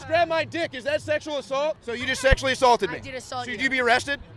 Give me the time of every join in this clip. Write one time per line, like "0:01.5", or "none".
0:01.9